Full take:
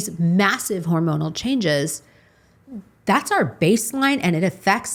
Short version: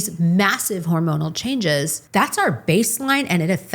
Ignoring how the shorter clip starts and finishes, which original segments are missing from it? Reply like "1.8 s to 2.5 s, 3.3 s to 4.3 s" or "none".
2.0 s to 2.9 s